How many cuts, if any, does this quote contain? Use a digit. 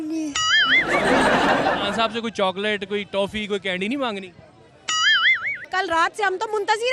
1